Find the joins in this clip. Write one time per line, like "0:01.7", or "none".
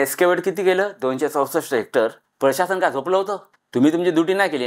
0:02.2